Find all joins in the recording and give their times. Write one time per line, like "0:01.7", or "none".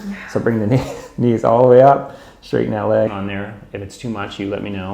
0:03.1

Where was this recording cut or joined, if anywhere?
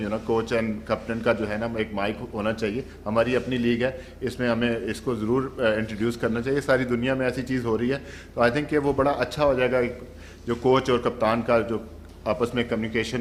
none

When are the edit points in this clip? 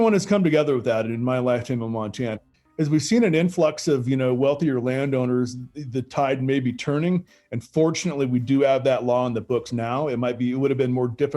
0:02.5

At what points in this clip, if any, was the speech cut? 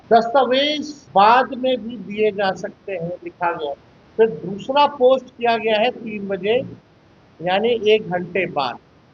0:00.9
0:03.9

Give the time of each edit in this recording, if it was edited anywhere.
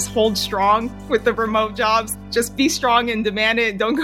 0:00.9
0:02.2

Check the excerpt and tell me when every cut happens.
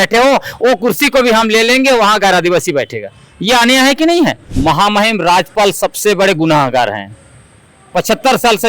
0:04.5

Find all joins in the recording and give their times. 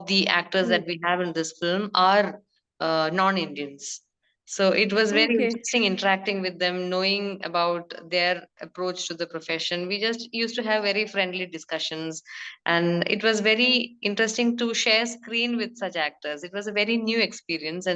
none

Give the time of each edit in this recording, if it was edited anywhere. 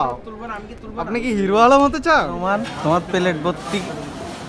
0:02.4

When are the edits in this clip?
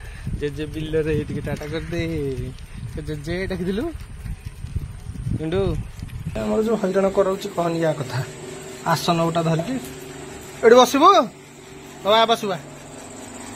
0:06.3

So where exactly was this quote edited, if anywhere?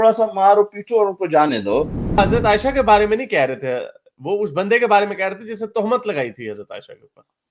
0:02.2

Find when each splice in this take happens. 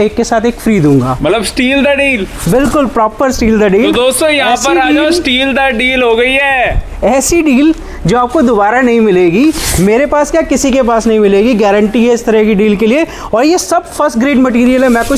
none

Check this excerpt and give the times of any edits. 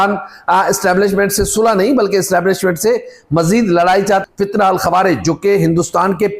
0:04.2

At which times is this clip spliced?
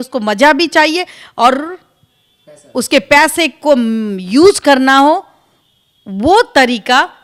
none

